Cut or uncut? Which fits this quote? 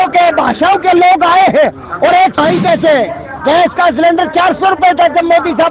cut